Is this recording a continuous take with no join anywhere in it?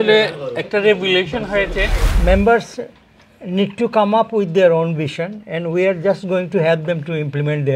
no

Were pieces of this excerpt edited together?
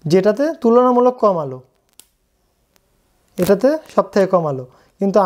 no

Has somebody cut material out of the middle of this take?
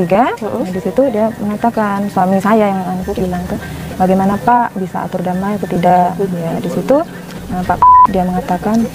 no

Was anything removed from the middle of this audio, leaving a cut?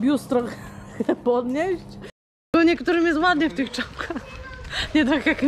yes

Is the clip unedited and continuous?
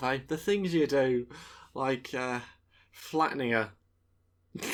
yes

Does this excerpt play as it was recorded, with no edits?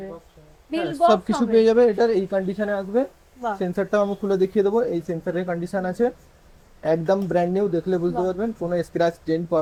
yes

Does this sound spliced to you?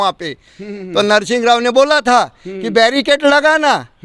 no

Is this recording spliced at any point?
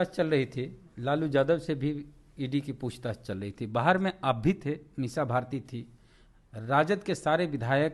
no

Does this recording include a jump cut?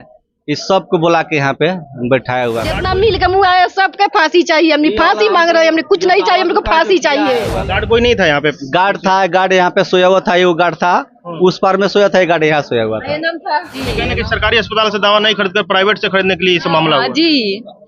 yes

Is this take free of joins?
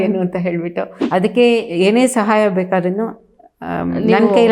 no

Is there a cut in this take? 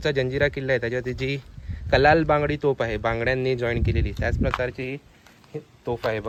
no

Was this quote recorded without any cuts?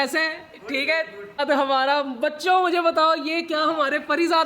no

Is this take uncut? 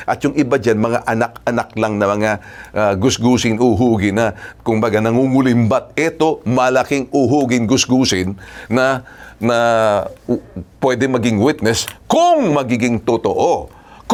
yes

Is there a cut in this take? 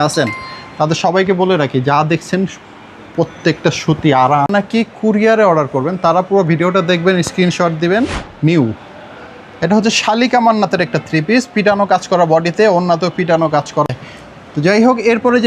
yes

